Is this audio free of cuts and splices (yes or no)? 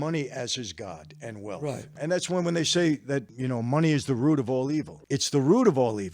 no